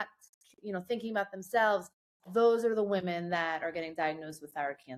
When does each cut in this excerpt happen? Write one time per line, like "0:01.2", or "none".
none